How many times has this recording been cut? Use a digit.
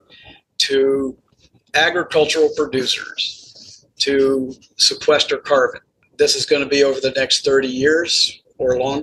1